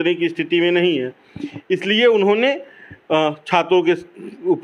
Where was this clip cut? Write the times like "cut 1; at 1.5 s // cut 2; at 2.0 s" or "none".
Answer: none

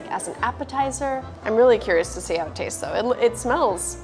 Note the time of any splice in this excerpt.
cut 1; at 1.3 s

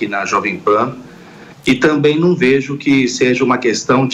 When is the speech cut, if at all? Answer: none

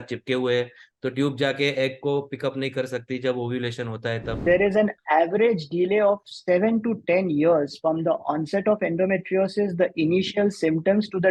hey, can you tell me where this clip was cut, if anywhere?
cut 1; at 4.4 s

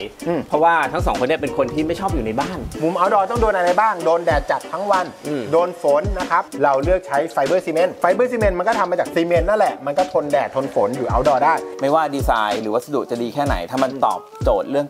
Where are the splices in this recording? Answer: cut 1; at 2.7 s // cut 2; at 6.5 s // cut 3; at 9.1 s // cut 4; at 11.6 s

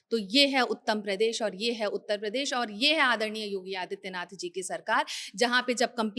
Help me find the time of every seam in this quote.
none

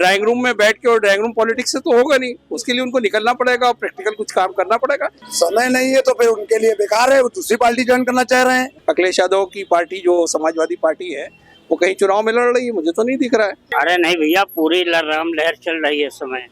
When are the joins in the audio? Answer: cut 1; at 5.2 s // cut 2; at 8.7 s // cut 3; at 13.6 s

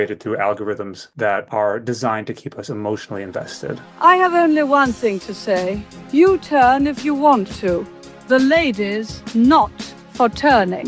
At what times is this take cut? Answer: cut 1; at 1.3 s // cut 2; at 3.9 s

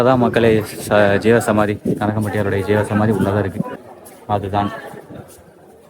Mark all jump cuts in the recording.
cut 1; at 3.7 s

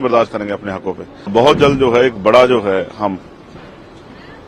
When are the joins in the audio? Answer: cut 1; at 1.3 s

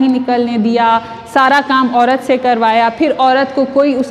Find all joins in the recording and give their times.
none

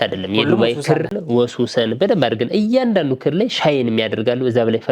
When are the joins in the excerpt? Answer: cut 1; at 1.2 s

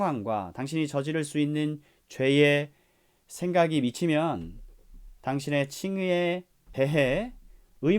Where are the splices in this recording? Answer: cut 1; at 6.6 s

